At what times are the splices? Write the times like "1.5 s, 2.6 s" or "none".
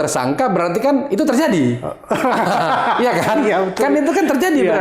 none